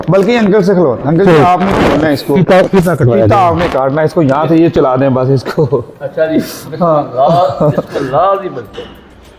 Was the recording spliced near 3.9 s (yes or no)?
no